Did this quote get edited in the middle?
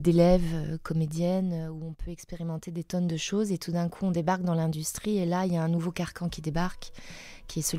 no; 0 cuts

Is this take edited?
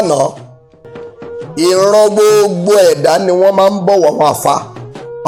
no; 0 cuts

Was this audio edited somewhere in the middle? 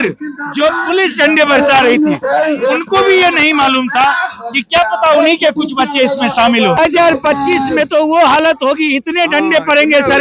yes; 1 cut; at 6.8 s

